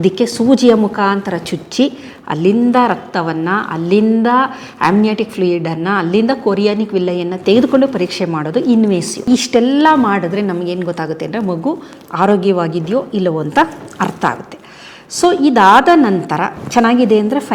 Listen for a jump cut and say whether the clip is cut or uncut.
cut